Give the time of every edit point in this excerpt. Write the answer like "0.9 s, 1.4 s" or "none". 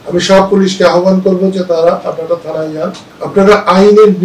none